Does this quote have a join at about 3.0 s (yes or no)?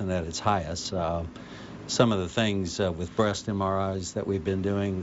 no